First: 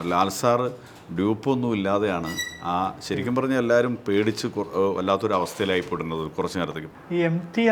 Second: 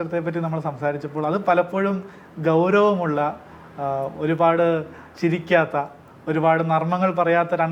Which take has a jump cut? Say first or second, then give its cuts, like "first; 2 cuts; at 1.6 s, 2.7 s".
first; 1 cut; at 6.8 s